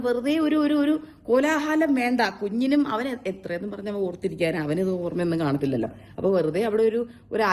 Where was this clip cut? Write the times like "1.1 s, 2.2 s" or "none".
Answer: none